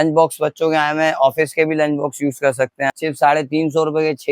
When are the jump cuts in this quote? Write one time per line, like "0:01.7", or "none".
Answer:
0:02.9